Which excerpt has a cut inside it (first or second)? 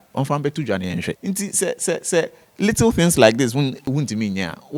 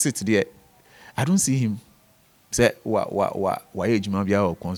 first